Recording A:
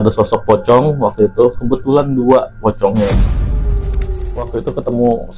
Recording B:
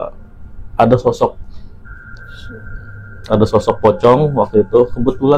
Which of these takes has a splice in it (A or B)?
A